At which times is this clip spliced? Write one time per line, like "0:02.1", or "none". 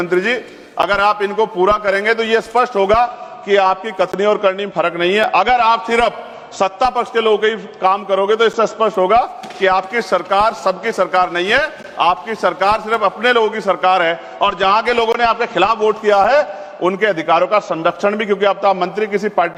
none